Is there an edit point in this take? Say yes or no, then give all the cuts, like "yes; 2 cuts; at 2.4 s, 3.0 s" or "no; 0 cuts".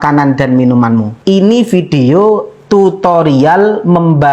yes; 1 cut; at 1.1 s